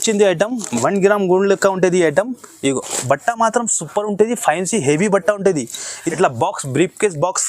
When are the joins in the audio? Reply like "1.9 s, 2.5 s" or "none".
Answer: 6.0 s